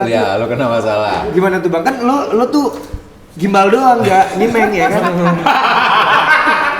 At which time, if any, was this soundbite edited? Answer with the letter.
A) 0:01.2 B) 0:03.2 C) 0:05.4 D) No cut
C